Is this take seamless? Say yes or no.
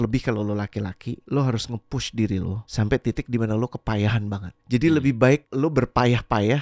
no